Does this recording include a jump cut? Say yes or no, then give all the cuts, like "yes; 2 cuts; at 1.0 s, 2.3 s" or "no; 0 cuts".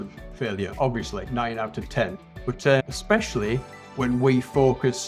no; 0 cuts